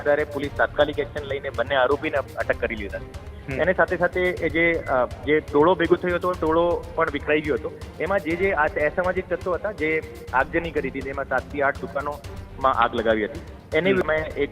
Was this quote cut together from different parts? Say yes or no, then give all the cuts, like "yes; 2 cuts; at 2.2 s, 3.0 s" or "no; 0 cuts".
no; 0 cuts